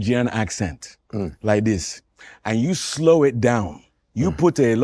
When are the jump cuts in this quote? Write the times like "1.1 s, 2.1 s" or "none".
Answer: none